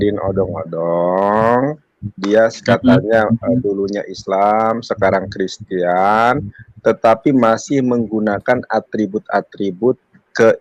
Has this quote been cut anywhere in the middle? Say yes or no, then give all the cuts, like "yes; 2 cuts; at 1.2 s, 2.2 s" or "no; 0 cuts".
no; 0 cuts